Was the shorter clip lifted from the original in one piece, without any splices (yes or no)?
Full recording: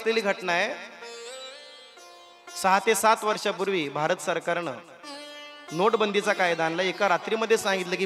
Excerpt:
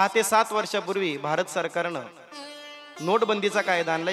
yes